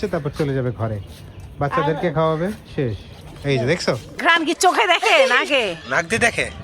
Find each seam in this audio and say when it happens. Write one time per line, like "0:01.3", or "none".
0:04.1

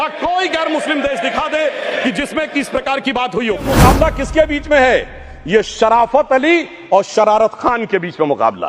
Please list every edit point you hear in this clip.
0:03.6

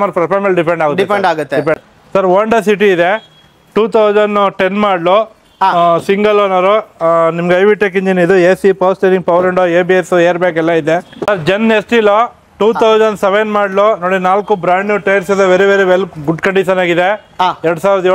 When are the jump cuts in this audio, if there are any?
0:01.8
0:11.3

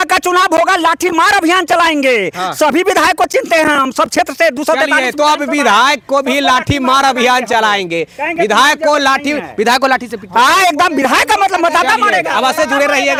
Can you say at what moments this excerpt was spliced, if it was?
none

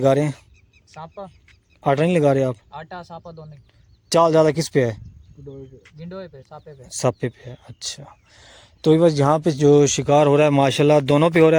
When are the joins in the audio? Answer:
none

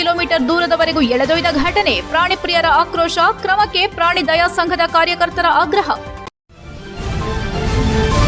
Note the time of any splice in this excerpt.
0:06.1

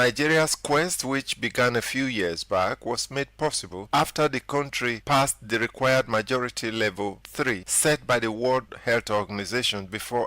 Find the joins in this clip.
0:03.7
0:04.9
0:07.2
0:08.7

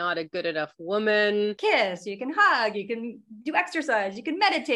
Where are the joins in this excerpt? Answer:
0:01.6

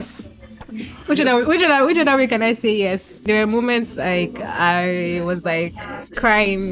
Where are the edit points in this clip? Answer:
0:03.2

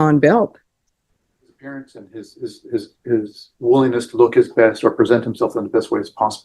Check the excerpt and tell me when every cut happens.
0:01.6

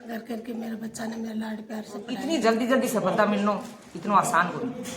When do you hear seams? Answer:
0:02.1

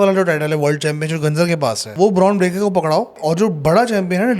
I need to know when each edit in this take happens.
0:01.8
0:03.2

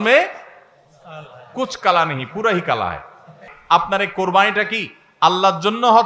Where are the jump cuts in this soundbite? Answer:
0:03.5

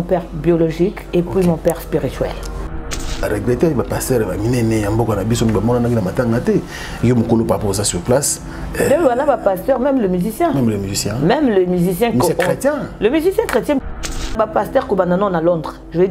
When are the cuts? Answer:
0:03.1
0:14.3

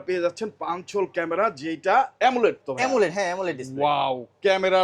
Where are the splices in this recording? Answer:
none

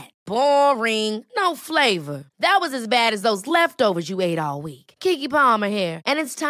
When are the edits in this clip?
none

